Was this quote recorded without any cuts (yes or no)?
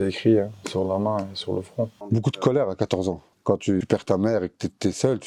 no